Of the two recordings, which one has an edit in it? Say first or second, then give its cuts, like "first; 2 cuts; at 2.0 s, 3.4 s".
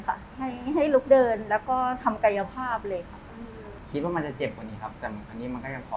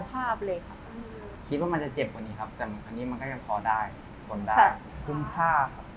second; 1 cut; at 4.8 s